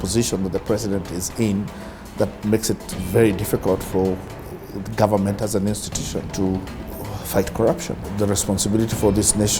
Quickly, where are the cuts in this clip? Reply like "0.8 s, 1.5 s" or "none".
6.3 s, 8.0 s